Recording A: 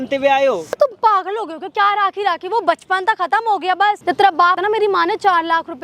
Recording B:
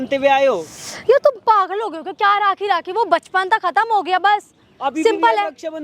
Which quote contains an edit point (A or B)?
A